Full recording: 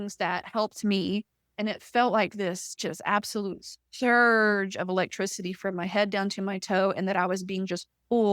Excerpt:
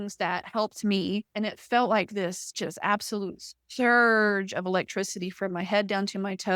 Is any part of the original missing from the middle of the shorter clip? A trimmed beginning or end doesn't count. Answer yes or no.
yes